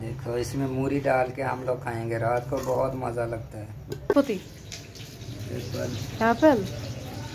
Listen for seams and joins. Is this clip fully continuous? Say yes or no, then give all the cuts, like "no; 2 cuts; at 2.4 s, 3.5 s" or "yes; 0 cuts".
no; 1 cut; at 4.1 s